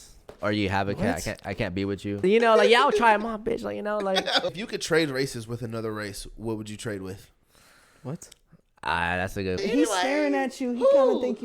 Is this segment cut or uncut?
cut